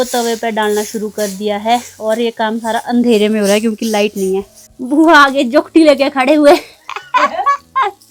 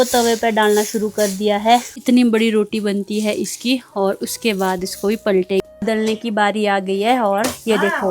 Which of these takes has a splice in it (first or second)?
second